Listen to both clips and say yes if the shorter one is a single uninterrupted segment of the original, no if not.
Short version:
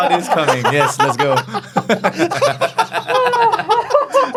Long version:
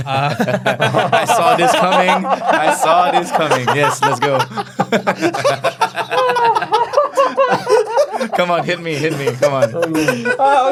yes